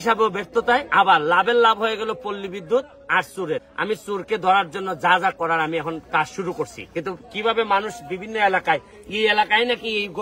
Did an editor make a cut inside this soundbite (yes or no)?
no